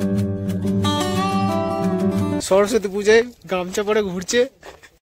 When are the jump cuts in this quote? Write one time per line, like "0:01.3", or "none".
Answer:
0:02.4